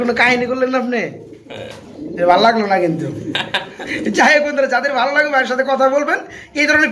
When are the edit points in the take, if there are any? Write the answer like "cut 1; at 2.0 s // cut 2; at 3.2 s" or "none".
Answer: none